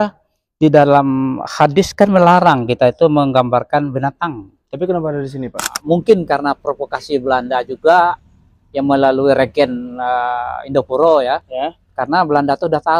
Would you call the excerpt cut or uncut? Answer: cut